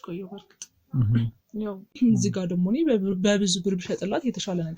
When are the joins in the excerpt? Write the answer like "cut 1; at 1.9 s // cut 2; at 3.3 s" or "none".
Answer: cut 1; at 1.8 s